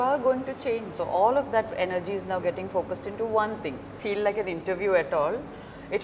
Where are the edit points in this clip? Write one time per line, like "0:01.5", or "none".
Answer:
0:00.9
0:03.9